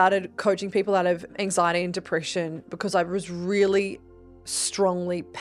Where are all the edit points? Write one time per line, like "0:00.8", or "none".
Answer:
0:01.3